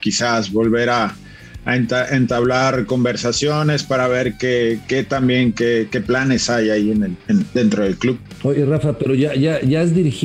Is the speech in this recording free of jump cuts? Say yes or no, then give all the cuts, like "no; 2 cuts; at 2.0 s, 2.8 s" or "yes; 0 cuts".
yes; 0 cuts